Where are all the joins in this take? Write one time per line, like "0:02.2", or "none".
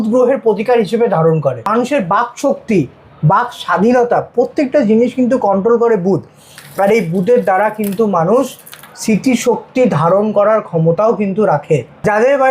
0:01.6